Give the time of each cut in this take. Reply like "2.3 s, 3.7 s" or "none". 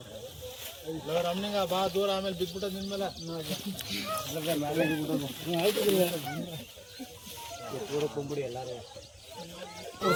none